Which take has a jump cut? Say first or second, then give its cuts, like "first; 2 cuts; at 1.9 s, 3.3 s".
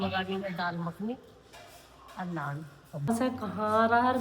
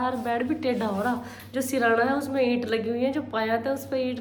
first; 1 cut; at 3.1 s